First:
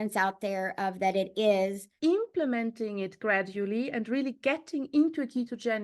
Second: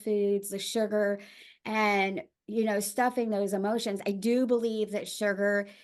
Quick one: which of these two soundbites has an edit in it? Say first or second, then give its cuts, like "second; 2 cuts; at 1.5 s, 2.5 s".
first; 1 cut; at 1.9 s